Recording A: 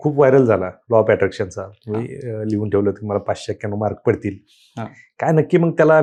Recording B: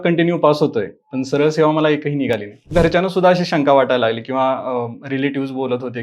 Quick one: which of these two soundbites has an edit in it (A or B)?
B